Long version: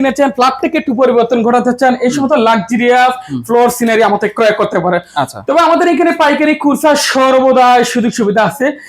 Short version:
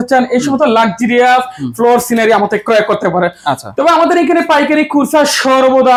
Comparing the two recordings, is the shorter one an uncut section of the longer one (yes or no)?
yes